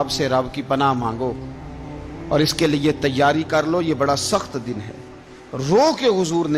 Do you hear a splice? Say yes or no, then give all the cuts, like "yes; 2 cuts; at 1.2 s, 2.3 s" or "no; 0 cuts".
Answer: no; 0 cuts